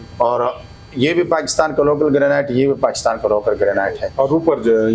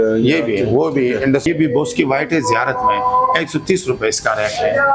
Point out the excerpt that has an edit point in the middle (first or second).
second